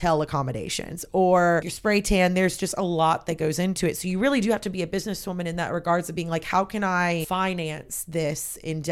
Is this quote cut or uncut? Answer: cut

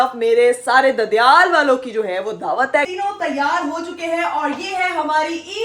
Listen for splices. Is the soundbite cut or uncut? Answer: cut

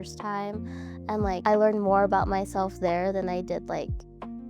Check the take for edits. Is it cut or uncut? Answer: uncut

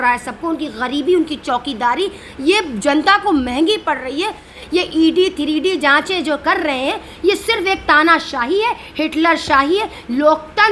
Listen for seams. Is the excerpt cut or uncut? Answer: cut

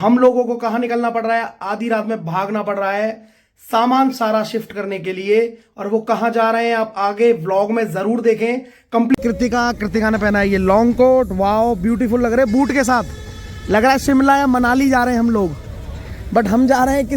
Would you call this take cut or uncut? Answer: cut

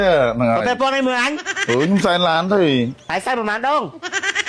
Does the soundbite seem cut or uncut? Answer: cut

